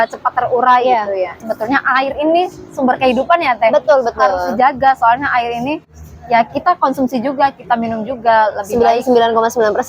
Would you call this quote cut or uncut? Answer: cut